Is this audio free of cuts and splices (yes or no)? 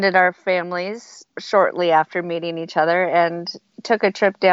yes